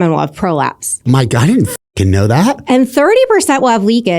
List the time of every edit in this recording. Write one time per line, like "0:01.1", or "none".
0:01.0

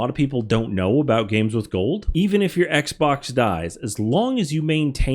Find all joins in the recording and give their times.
none

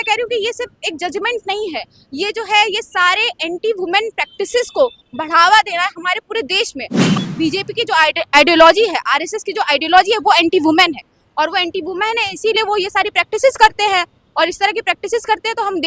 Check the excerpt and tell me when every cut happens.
0:07.1

